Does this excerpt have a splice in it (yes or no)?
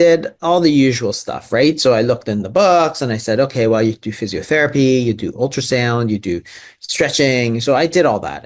no